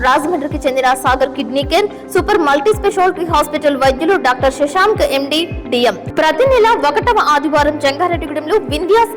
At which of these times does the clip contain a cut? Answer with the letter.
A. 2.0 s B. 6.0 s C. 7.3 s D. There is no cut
B